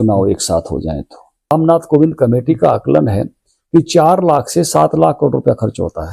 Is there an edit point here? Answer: yes; 1 cut; at 1.5 s

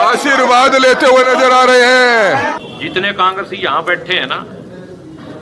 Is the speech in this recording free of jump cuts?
no; 1 cut; at 2.6 s

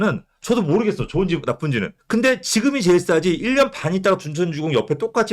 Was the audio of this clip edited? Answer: yes; 1 cut; at 2.0 s

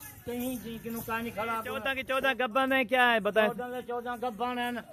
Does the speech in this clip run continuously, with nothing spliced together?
no; 1 cut; at 2.0 s

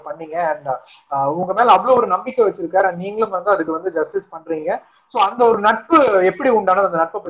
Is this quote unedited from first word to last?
yes; 0 cuts

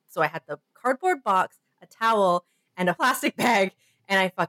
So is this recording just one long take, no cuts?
no; 1 cut; at 3.0 s

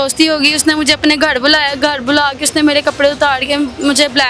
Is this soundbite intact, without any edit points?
yes; 0 cuts

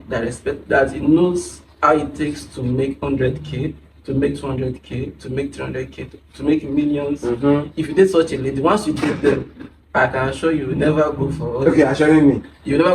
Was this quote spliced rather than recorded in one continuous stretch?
no; 0 cuts

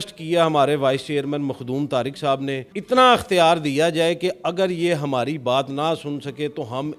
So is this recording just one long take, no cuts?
no; 1 cut; at 2.7 s

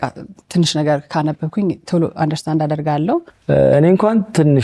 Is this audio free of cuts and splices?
no; 1 cut; at 3.3 s

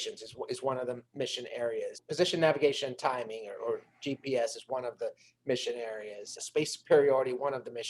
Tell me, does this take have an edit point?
yes; 2 cuts; at 2.0 s, 6.4 s

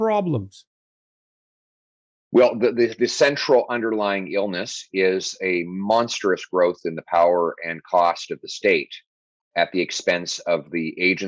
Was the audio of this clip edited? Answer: no; 0 cuts

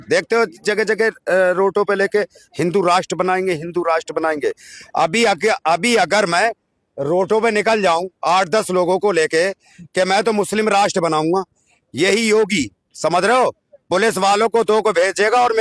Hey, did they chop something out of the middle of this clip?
no; 0 cuts

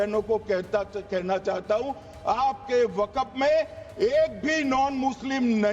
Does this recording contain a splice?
no; 0 cuts

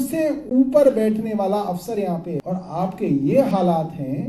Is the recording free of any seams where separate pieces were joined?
no; 1 cut; at 2.4 s

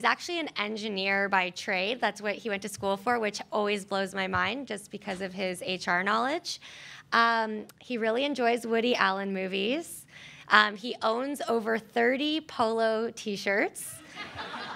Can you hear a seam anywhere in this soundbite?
yes; 1 cut; at 10.3 s

